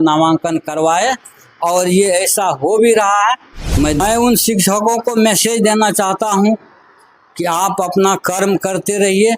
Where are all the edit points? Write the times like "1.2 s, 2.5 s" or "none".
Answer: 4.0 s